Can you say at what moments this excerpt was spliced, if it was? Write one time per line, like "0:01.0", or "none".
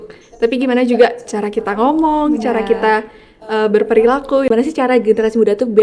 0:04.5